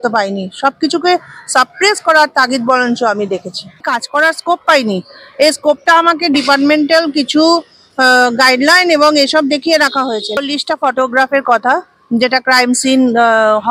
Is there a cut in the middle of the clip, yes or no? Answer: yes